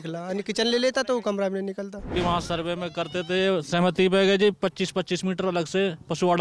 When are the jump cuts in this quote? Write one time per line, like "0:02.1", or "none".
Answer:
0:02.1